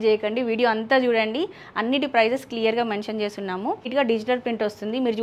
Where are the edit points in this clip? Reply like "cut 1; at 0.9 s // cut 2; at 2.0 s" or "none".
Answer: cut 1; at 3.9 s